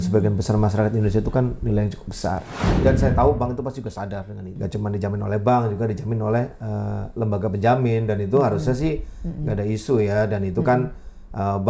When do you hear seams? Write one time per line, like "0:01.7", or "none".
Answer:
0:04.5